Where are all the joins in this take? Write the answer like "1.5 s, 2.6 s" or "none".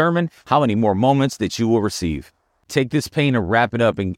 2.7 s